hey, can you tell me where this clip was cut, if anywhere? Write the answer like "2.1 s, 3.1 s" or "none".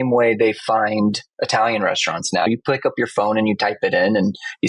2.5 s